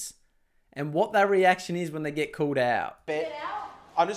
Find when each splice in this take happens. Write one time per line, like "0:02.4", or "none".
0:03.0